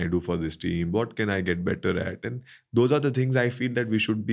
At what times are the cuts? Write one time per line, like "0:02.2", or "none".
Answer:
none